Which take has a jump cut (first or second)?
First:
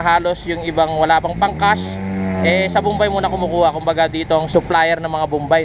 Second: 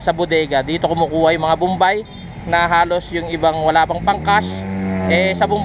first